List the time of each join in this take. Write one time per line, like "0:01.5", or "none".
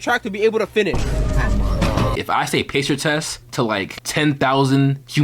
0:02.2

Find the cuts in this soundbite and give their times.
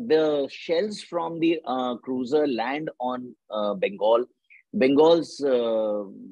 none

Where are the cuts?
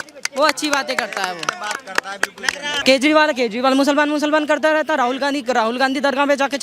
0:02.8

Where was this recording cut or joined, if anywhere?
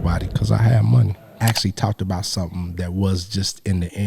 0:01.3

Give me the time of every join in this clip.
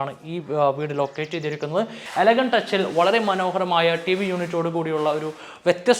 0:02.0

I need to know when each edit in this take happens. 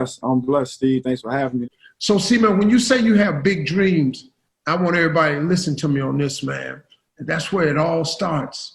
0:01.6

